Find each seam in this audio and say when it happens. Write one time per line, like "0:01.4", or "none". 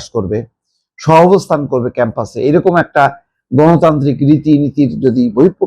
none

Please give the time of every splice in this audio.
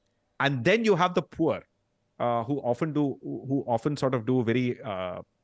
none

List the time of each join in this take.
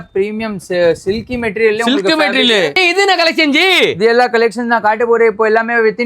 0:02.8

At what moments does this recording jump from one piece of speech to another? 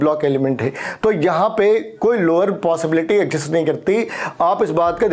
none

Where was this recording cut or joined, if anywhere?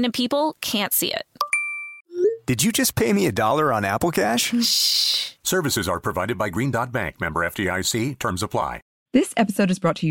0:08.9

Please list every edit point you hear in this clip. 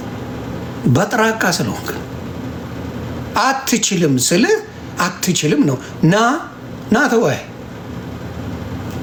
none

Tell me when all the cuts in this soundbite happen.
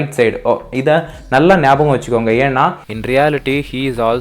0:02.9

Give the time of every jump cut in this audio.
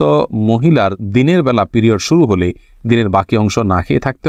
none

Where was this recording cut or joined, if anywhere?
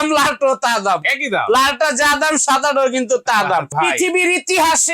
0:03.7

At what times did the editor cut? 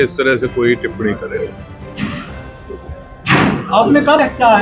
none

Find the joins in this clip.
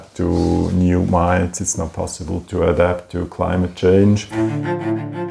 0:04.3

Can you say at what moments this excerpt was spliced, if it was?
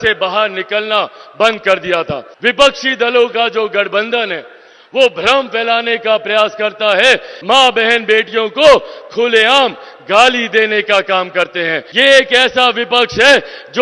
0:02.2
0:07.3
0:11.8

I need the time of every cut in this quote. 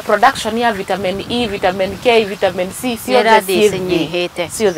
none

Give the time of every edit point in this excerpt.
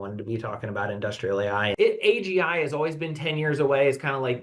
0:01.7

